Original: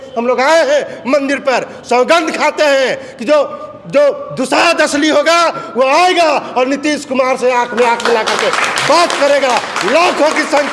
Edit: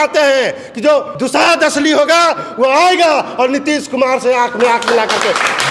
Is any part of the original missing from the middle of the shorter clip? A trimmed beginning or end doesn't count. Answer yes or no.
yes